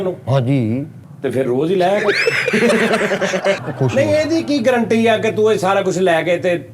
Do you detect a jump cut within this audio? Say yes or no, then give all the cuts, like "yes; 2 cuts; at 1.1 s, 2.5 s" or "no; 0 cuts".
yes; 2 cuts; at 1.0 s, 3.6 s